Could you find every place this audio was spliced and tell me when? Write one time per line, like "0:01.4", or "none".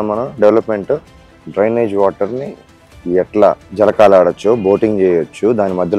0:03.6